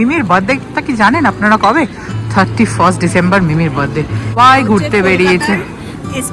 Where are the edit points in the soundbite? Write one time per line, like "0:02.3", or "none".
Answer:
0:04.3